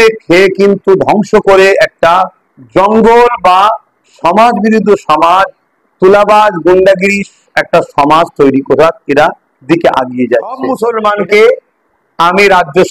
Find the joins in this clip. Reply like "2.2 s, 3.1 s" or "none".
10.7 s

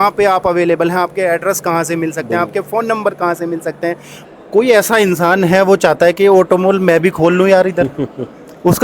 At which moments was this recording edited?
4.2 s

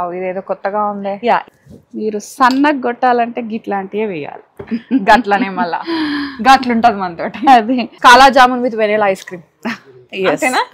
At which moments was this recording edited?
1.5 s, 7.9 s

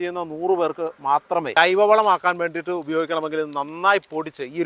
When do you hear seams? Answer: 1.5 s

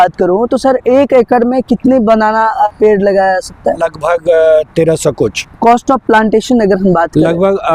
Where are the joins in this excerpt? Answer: 2.7 s, 3.8 s, 5.4 s

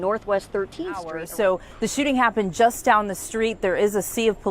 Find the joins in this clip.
1.2 s

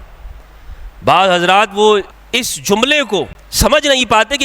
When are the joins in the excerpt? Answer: 2.2 s, 3.4 s

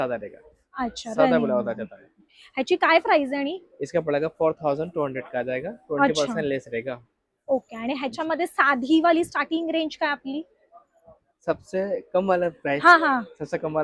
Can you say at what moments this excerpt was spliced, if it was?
none

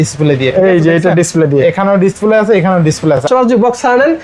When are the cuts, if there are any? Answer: 3.2 s

